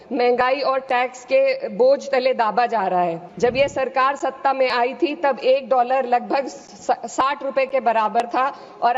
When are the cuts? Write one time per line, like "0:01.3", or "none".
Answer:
0:03.2